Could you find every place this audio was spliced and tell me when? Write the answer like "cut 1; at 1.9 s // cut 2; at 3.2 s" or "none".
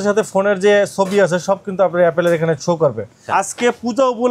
cut 1; at 3.2 s